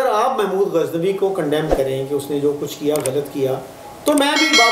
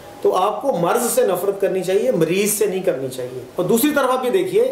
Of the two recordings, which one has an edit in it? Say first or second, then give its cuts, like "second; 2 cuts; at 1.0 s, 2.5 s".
second; 1 cut; at 3.4 s